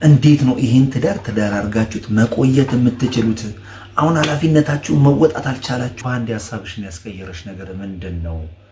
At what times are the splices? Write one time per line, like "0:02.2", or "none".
0:05.9